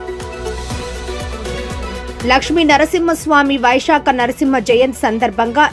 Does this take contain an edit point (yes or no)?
yes